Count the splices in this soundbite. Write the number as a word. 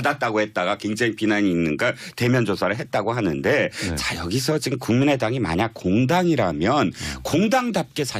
one